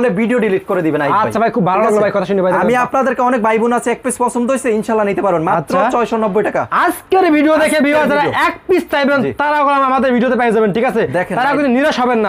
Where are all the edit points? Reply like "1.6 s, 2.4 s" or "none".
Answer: none